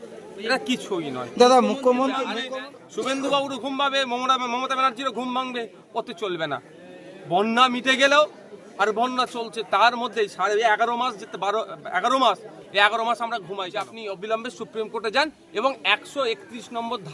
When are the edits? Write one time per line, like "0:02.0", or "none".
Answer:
0:02.3
0:13.9